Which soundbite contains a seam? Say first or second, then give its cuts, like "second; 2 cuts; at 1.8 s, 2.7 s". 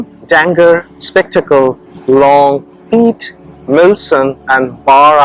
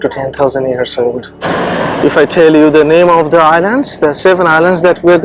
second; 1 cut; at 1.3 s